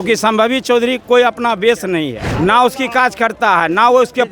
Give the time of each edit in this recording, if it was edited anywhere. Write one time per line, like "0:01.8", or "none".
0:02.3